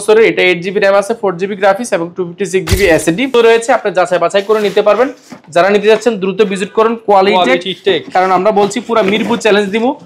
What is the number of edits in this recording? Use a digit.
1